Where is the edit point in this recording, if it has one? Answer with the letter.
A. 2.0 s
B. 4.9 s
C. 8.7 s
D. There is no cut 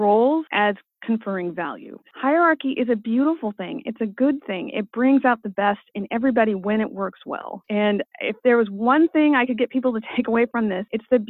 A